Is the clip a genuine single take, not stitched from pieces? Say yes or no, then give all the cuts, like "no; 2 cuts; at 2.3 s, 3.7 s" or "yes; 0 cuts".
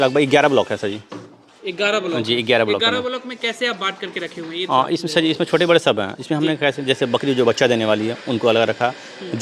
yes; 0 cuts